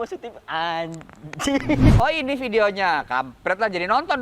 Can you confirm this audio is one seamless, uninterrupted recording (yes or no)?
no